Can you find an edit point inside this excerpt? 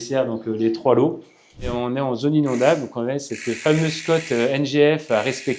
yes; 1 cut; at 1.7 s

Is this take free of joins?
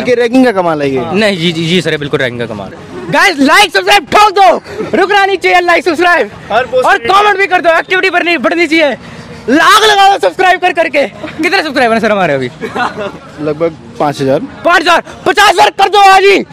no; 1 cut; at 2.8 s

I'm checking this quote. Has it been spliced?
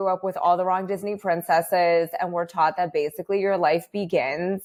no; 0 cuts

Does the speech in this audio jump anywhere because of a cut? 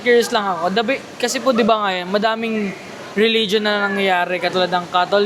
no; 0 cuts

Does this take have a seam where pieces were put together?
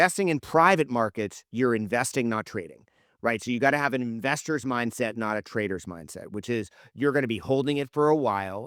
no; 0 cuts

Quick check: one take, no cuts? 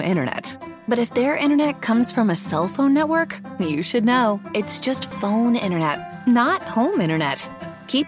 yes; 0 cuts

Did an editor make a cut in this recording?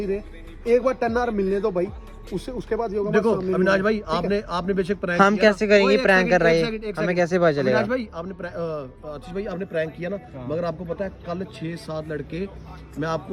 no; 0 cuts

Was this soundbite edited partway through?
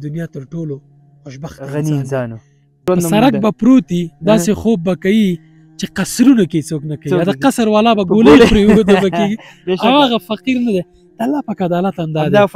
yes; 1 cut; at 2.8 s

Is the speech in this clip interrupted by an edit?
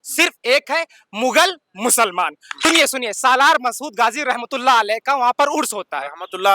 yes; 1 cut; at 2.5 s

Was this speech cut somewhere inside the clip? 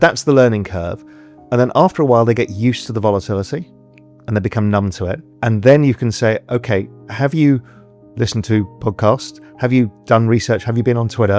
yes; 1 cut; at 5.3 s

